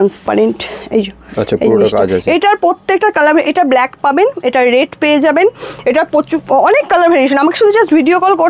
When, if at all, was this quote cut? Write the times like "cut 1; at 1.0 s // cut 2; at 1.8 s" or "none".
none